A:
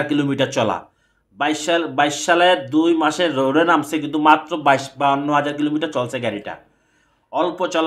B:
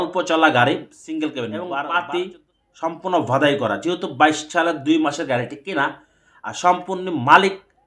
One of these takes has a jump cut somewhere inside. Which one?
B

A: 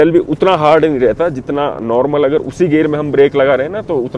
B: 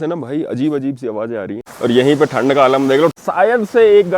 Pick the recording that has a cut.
B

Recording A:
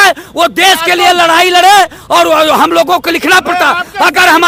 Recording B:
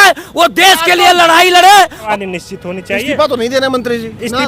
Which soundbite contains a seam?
B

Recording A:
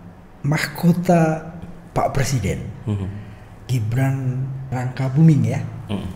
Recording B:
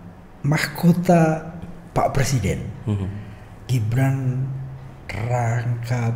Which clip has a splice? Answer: A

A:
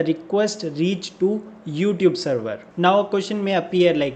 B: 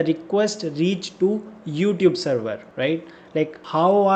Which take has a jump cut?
A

